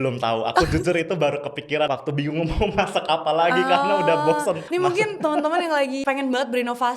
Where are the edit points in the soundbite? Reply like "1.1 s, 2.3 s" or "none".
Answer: 1.9 s, 4.6 s, 6.0 s